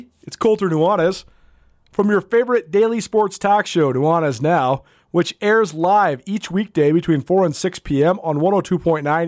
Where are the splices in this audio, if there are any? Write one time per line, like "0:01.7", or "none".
none